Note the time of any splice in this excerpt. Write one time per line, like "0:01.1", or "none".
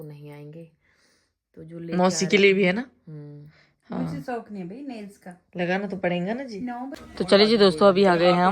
0:07.0

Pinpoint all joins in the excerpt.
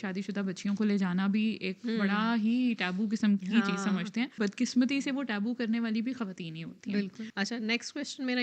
0:04.4
0:07.2

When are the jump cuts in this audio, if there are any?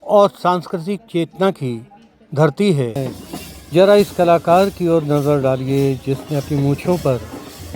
0:03.1

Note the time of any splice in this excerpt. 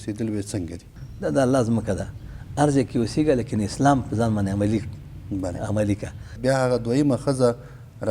0:01.0
0:06.3

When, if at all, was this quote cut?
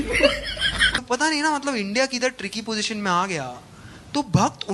0:00.9

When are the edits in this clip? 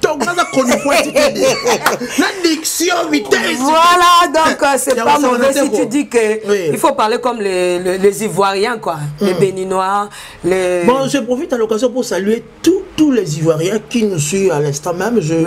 none

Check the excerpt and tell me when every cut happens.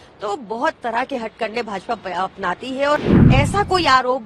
0:03.1

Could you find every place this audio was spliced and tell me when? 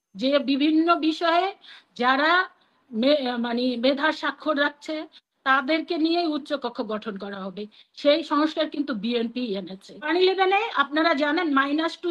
0:10.1

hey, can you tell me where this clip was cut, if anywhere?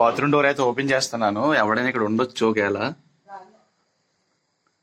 none

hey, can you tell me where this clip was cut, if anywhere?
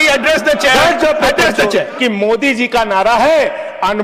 0:02.0

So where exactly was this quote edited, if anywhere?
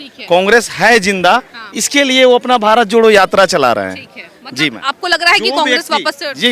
none

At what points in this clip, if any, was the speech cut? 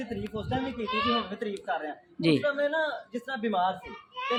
none

